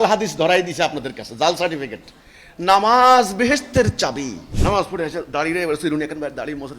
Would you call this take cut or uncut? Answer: cut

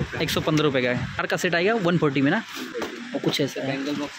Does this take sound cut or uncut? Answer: cut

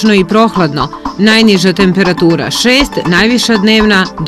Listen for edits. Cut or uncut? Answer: uncut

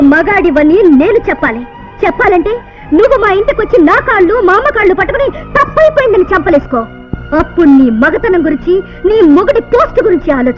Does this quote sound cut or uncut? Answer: uncut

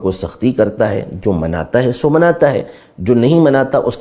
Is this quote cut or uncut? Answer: uncut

